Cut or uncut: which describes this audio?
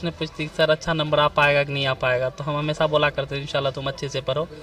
uncut